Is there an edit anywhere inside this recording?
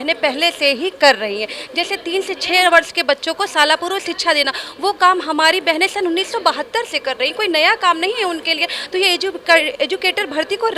no; 0 cuts

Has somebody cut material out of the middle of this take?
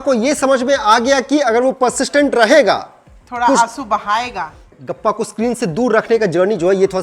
yes; 1 cut; at 4.7 s

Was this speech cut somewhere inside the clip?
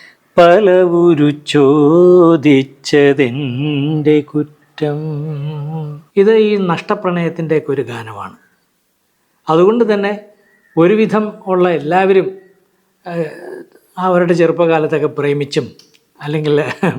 yes; 1 cut; at 6.0 s

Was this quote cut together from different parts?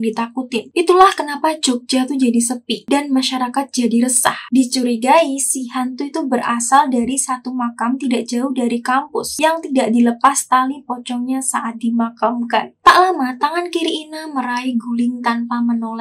yes; 1 cut; at 12.7 s

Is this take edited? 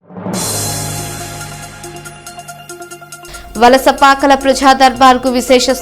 yes; 1 cut; at 3.0 s

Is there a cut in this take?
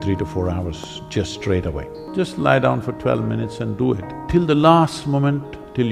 yes; 2 cuts; at 1.9 s, 4.1 s

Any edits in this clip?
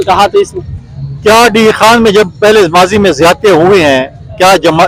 no; 0 cuts

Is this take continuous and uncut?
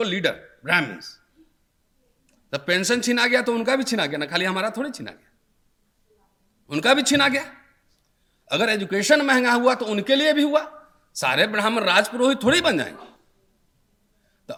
yes; 0 cuts

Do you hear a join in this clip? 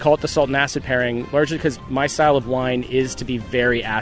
no; 0 cuts

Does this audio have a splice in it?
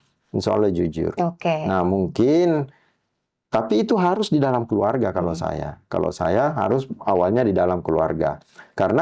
no; 0 cuts

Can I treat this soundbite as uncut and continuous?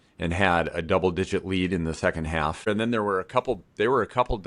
no; 1 cut; at 2.7 s

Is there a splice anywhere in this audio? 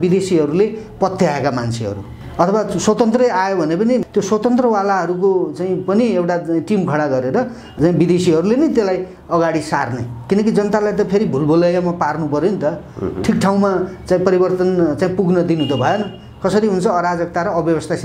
yes; 3 cuts; at 2.2 s, 4.1 s, 7.7 s

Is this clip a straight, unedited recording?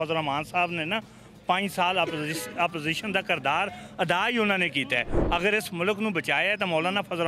yes; 0 cuts

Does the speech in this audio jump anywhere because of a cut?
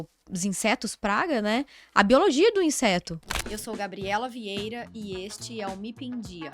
yes; 1 cut; at 3.2 s

